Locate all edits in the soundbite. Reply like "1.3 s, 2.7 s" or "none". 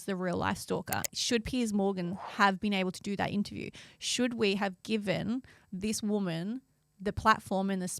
1.0 s